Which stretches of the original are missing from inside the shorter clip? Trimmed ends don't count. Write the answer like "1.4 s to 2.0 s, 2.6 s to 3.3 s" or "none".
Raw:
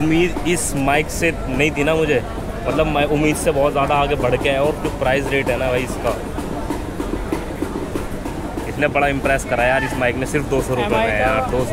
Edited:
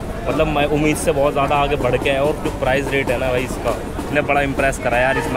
6.4 s to 8.7 s